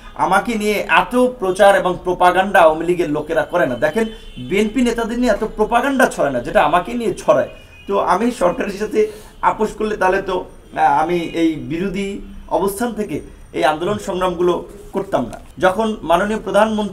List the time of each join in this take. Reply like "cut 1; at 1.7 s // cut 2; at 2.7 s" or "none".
cut 1; at 15.4 s